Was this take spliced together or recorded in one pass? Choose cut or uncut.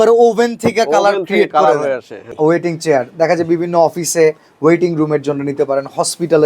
cut